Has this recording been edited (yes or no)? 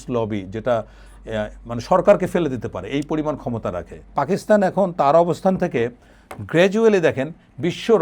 yes